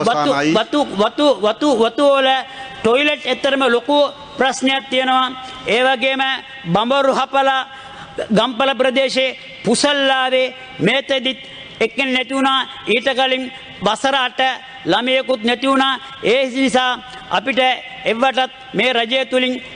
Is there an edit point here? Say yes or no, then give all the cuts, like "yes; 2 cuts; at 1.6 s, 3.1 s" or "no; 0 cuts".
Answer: no; 0 cuts